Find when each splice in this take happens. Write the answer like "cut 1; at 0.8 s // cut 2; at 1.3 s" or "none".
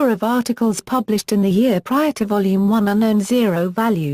cut 1; at 1.1 s